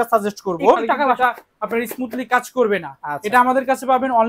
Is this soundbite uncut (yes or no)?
no